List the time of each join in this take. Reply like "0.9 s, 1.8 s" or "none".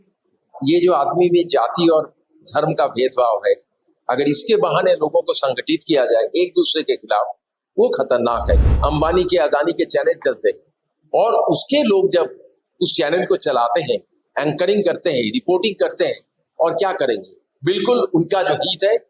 8.7 s